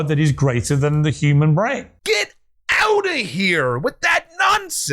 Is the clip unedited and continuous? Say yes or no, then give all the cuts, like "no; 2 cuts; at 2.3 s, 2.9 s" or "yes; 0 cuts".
no; 1 cut; at 1.9 s